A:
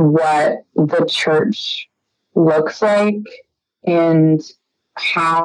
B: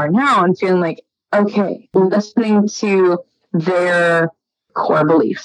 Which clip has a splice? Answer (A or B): B